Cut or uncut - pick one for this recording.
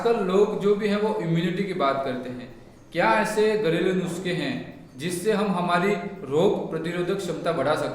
uncut